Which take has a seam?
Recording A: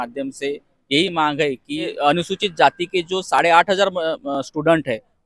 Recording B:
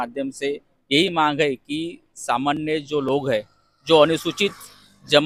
A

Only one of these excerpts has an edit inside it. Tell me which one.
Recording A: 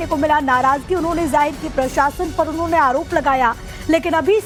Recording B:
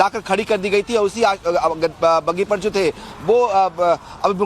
B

